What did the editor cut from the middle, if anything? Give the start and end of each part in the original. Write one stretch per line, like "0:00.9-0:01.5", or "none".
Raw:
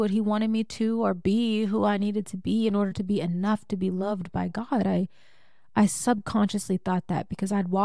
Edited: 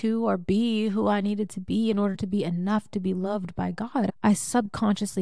0:04.9-0:05.6